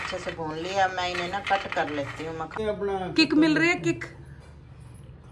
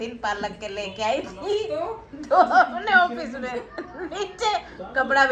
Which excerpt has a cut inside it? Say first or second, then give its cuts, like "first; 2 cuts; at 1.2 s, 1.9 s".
first; 1 cut; at 2.6 s